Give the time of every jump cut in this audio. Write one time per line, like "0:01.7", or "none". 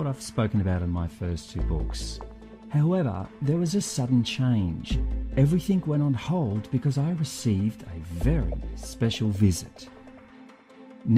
none